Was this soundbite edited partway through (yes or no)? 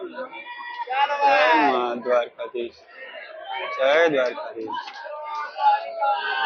no